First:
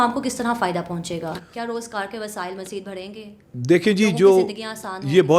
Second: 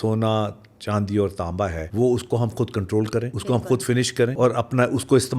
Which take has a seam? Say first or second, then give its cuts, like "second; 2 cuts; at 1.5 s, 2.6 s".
second; 3 cuts; at 1.8 s, 3.3 s, 4.3 s